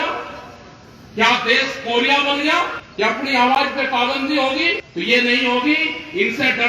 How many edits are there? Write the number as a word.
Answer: two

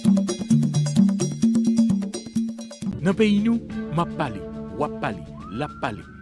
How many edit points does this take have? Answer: one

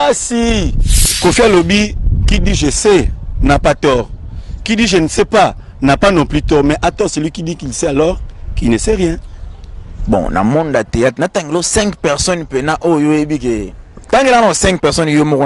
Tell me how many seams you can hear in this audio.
one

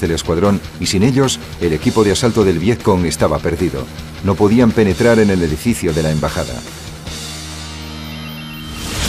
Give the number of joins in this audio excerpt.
one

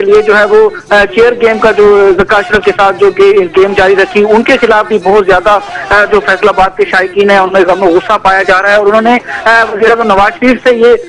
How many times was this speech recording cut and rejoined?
zero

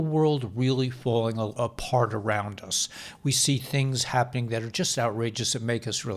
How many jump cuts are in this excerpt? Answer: one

